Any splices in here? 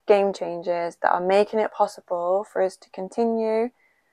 no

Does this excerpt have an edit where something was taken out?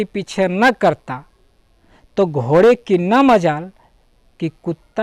no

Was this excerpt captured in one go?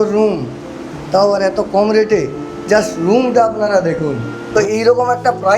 no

